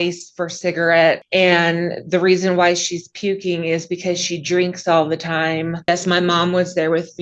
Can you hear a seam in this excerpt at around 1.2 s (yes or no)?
yes